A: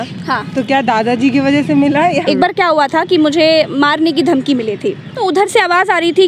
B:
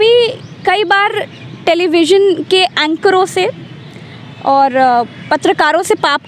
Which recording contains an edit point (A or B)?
A